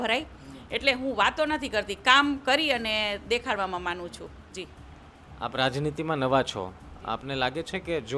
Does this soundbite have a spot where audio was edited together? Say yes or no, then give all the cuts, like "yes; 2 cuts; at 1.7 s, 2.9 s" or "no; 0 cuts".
no; 0 cuts